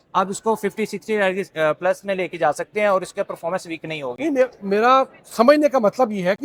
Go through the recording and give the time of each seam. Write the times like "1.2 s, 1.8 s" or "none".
none